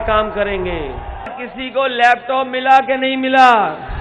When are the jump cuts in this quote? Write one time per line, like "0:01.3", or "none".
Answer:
0:01.4